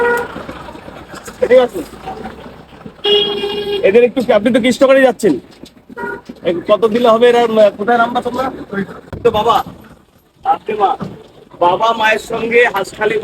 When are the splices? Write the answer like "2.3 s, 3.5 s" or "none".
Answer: 9.1 s